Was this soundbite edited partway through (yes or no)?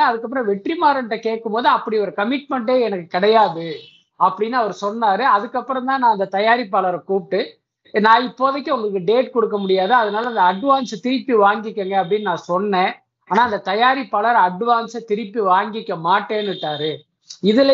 no